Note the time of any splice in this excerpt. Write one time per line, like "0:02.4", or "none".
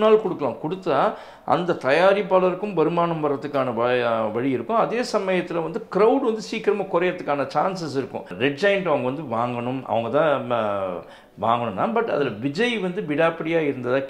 0:08.3